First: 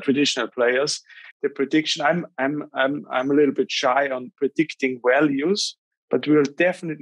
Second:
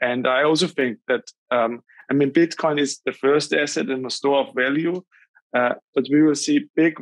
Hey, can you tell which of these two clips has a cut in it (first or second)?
first